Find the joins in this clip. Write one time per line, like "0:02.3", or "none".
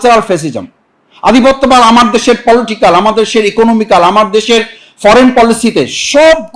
none